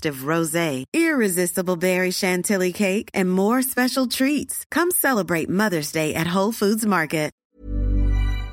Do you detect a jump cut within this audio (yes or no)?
yes